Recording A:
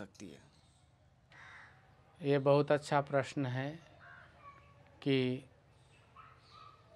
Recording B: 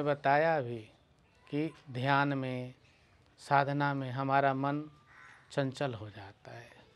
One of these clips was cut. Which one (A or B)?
A